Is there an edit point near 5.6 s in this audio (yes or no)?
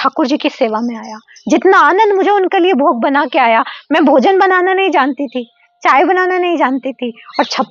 no